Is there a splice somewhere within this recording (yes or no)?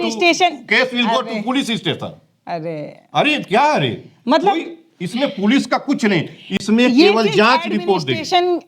no